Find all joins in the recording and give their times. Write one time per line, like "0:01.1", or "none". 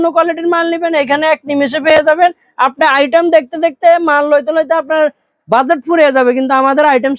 none

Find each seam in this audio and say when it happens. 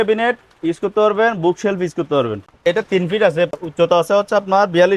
0:02.5
0:03.5

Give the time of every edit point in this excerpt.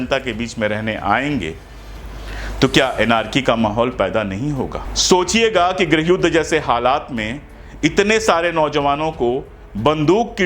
0:04.9

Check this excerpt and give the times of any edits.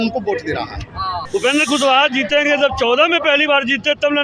0:01.2

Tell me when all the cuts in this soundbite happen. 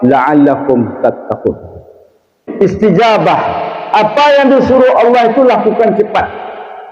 0:02.4

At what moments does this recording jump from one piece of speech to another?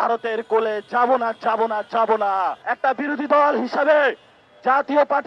0:02.6

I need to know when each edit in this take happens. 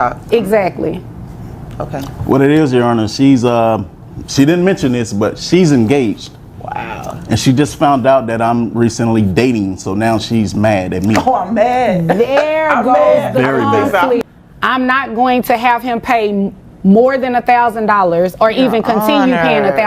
0:14.2

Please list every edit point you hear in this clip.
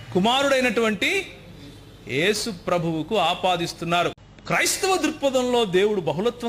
0:04.2

